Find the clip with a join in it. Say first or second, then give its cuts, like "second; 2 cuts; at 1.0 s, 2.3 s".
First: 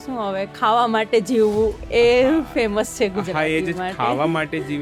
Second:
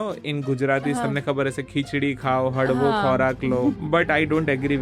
second; 1 cut; at 3.8 s